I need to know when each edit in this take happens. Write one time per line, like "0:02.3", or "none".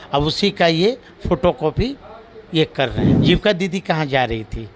0:03.1